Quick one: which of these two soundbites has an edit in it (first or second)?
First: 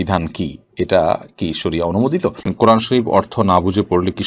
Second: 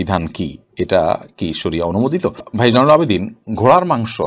first